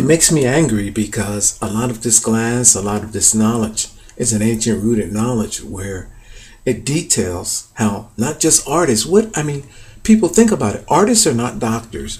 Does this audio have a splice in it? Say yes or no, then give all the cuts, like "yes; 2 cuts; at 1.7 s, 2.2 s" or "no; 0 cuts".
yes; 1 cut; at 5.5 s